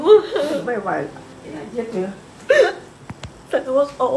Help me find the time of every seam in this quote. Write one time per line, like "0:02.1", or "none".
0:01.3

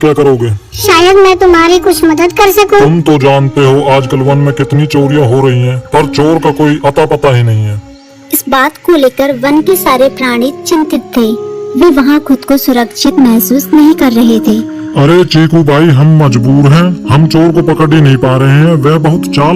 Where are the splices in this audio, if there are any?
0:16.6

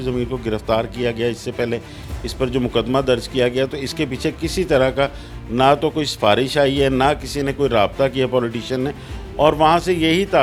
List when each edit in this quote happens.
none

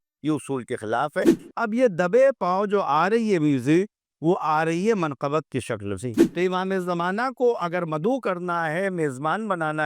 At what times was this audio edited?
0:01.4
0:06.3

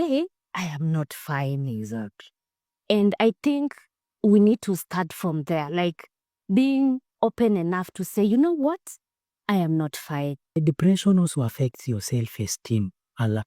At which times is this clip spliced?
0:10.6

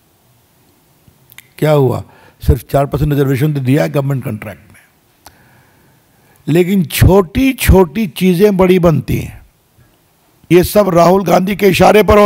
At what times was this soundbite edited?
0:10.5

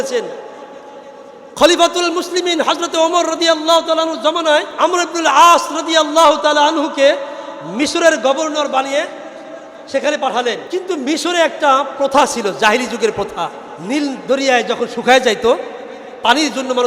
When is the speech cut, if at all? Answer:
0:04.7
0:10.6
0:13.7

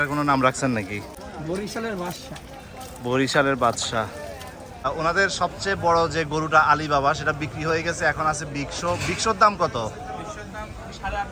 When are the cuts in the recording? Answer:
0:01.2
0:04.9

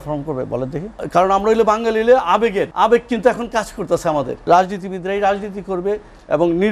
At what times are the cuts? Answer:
0:00.9
0:02.7
0:04.3

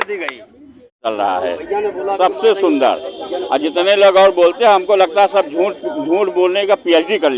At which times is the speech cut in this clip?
0:01.1

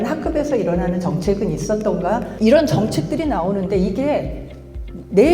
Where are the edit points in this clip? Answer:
0:02.3

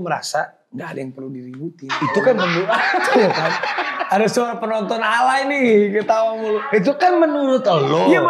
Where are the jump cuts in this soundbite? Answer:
none

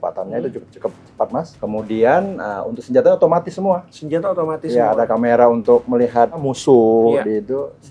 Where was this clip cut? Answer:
0:01.5
0:06.4

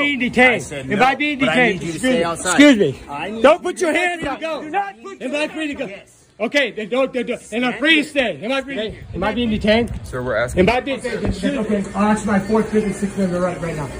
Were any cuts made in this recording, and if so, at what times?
0:05.0
0:09.0
0:11.3

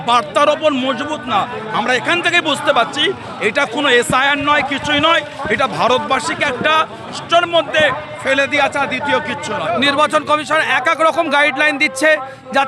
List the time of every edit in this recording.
0:07.2
0:09.6

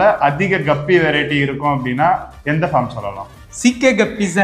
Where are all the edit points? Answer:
none

